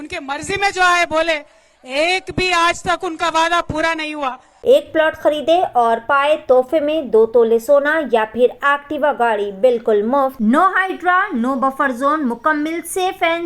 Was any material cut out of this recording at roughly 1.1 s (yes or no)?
no